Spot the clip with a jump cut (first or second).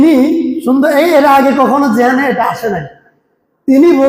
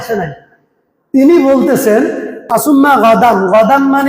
second